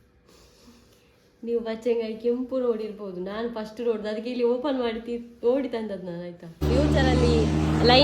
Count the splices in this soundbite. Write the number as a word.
one